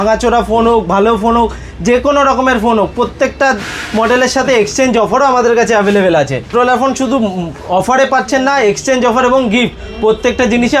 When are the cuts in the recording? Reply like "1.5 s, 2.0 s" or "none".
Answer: 6.5 s